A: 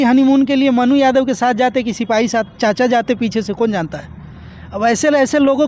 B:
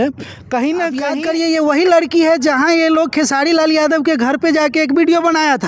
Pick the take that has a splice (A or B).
B